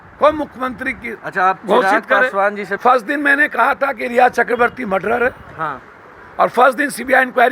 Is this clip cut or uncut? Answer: cut